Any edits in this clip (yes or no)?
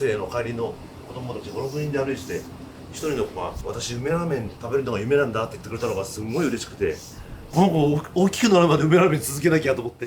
yes